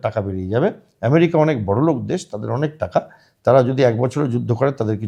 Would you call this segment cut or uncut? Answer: uncut